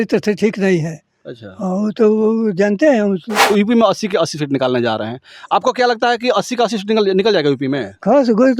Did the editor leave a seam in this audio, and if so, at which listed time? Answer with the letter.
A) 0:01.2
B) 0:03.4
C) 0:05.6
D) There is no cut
B